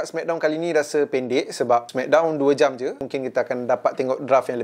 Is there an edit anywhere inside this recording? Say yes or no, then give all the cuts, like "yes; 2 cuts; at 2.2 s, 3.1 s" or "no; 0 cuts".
yes; 2 cuts; at 1.9 s, 3.0 s